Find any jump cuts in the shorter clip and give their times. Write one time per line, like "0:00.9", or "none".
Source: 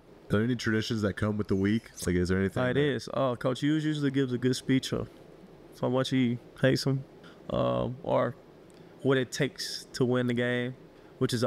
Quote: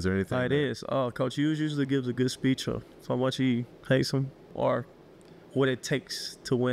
0:02.9
0:04.5